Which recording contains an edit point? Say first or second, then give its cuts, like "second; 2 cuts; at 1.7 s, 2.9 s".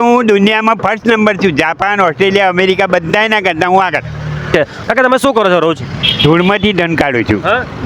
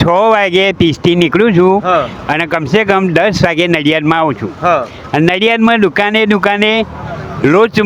first; 1 cut; at 4.5 s